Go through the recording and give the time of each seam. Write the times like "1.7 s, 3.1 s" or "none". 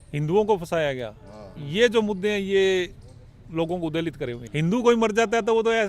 4.4 s